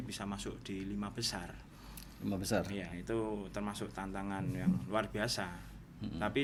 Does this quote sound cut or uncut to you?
uncut